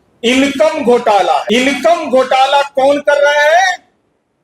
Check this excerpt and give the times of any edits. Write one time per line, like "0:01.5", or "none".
0:01.4